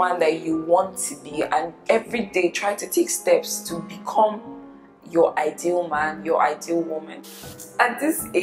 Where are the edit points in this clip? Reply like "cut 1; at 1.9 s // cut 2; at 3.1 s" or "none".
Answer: cut 1; at 1.7 s // cut 2; at 7.1 s